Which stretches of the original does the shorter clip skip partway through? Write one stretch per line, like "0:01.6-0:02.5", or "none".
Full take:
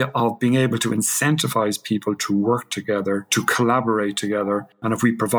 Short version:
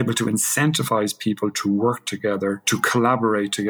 none